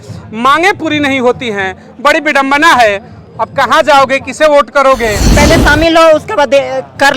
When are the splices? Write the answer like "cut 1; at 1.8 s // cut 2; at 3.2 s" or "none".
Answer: cut 1; at 5.2 s